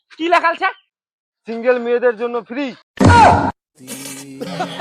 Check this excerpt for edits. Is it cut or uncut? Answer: cut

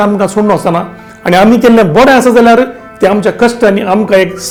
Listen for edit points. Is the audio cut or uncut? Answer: uncut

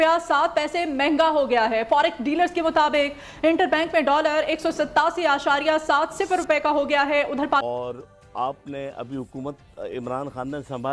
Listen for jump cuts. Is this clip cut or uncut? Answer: cut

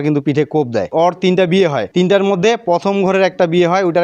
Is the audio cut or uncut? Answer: cut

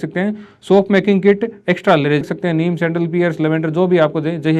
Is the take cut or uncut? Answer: cut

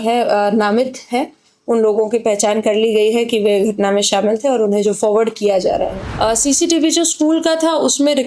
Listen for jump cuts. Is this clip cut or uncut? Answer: cut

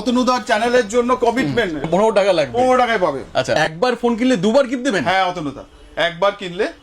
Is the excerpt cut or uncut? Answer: cut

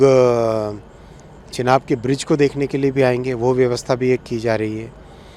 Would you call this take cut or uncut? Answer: uncut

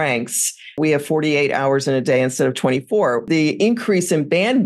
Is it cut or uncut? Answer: cut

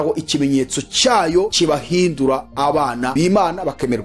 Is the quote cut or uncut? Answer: cut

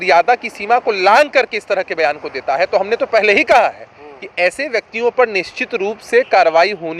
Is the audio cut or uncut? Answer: uncut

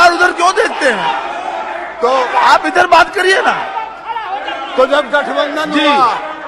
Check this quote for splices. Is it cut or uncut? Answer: uncut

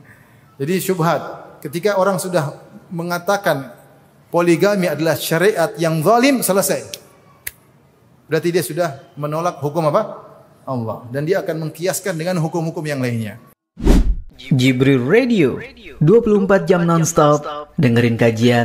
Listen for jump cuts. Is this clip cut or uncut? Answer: cut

